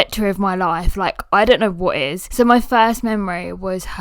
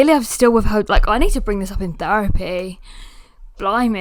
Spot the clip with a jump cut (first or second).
first